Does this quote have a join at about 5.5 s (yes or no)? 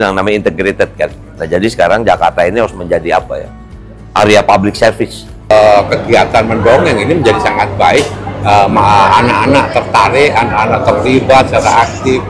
yes